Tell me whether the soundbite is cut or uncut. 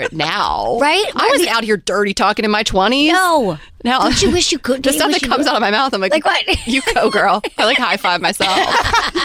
uncut